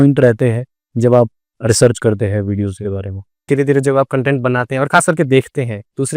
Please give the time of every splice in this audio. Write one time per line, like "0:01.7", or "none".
0:03.5